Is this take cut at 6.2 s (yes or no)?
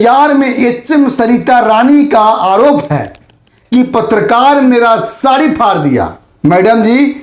yes